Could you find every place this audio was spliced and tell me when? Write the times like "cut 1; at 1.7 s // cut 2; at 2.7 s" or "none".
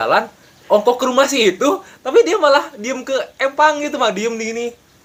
none